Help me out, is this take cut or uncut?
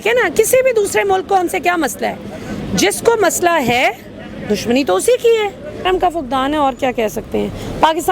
cut